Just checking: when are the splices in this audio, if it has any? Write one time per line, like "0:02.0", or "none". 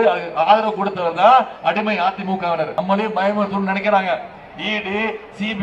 0:02.7